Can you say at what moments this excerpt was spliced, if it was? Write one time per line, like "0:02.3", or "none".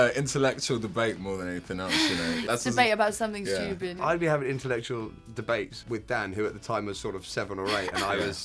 0:02.5
0:03.9
0:05.8